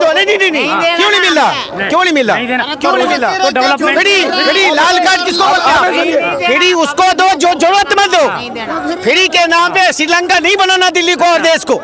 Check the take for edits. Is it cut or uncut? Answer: uncut